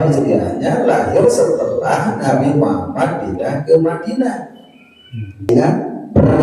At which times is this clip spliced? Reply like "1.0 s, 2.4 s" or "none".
5.5 s